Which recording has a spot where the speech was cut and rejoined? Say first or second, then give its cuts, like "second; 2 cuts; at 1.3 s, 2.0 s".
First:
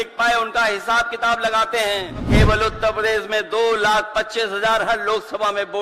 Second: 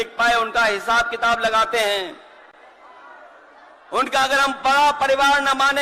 first; 1 cut; at 2.3 s